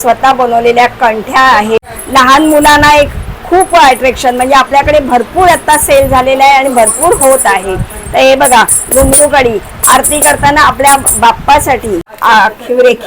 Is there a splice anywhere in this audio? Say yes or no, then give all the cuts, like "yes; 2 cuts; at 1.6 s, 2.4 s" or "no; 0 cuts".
yes; 2 cuts; at 2.0 s, 12.1 s